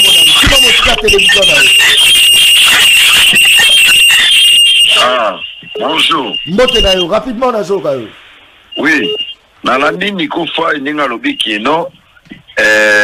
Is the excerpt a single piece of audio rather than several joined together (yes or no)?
yes